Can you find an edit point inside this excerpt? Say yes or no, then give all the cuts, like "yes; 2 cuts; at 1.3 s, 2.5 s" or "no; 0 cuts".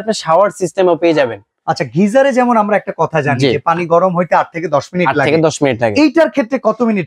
no; 0 cuts